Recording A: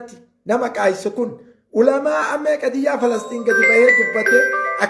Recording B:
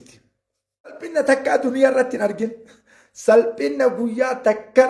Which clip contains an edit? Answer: B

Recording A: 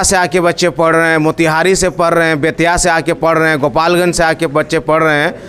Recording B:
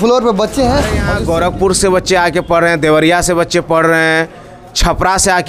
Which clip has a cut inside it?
B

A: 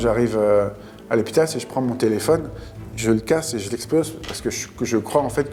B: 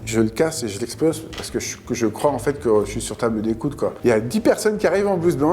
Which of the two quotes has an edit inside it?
B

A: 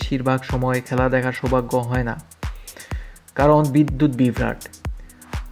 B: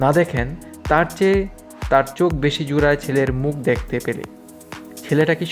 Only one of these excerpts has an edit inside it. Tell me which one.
B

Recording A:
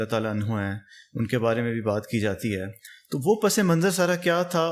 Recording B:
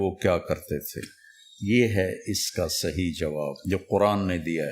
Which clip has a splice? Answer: B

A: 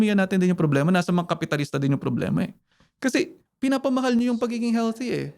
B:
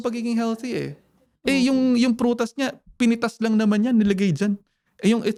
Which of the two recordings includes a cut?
A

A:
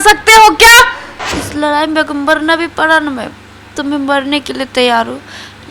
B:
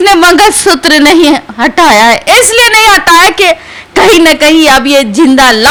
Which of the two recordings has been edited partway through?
A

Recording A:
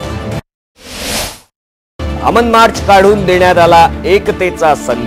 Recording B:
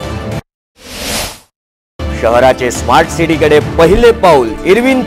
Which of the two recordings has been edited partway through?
A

